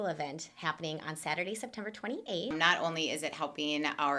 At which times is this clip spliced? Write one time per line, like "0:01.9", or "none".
0:02.5